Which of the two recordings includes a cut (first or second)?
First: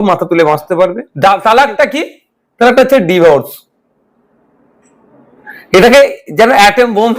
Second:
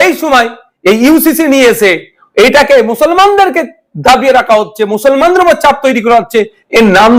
first